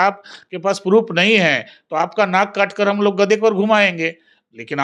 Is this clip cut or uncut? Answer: uncut